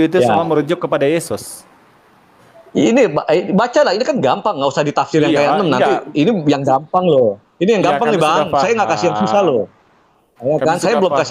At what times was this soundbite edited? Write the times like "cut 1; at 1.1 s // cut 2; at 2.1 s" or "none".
none